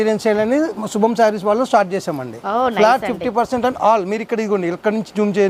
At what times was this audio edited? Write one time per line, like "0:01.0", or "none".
none